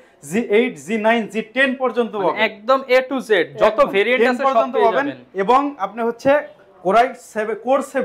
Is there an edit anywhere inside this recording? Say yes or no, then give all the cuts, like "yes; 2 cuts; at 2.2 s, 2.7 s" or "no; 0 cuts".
no; 0 cuts